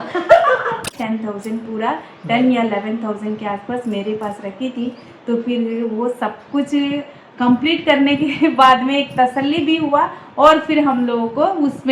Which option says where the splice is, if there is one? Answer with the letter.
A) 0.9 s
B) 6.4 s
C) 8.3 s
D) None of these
A